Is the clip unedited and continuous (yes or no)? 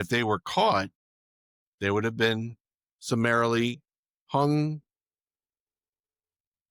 yes